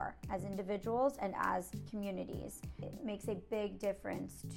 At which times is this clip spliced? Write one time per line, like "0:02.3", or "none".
0:01.8
0:02.8